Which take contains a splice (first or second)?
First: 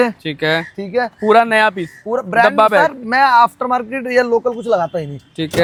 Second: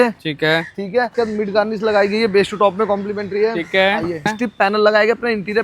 second